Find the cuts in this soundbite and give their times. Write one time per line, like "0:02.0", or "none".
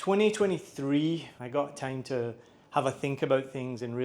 0:01.3